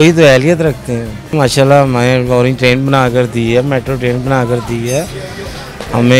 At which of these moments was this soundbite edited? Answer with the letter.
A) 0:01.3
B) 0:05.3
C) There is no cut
A